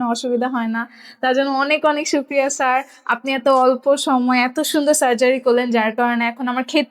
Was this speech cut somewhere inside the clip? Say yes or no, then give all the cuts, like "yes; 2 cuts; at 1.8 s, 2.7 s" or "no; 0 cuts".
no; 0 cuts